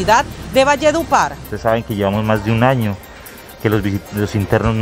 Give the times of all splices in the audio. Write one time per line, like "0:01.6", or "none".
0:01.4